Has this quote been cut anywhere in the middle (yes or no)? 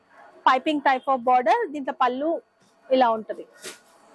no